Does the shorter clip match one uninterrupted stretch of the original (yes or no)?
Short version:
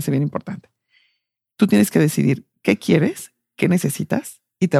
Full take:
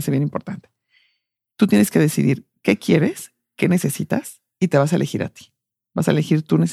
yes